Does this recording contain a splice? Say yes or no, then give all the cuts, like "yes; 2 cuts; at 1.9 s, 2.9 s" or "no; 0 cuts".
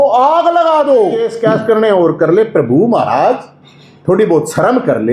yes; 1 cut; at 1.3 s